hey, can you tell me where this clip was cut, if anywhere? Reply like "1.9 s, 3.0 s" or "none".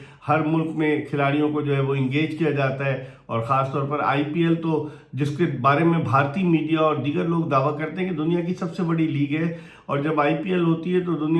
none